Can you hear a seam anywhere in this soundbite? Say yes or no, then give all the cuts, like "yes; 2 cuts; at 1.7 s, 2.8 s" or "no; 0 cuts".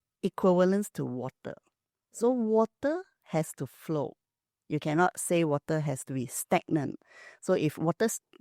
no; 0 cuts